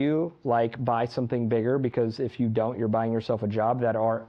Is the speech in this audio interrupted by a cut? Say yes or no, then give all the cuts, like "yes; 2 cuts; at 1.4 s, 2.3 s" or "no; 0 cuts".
no; 0 cuts